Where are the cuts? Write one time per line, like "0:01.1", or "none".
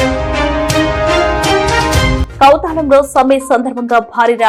none